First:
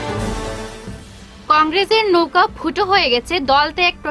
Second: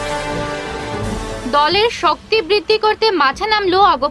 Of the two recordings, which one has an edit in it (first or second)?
second